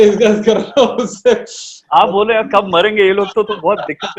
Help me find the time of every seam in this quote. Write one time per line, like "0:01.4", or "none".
none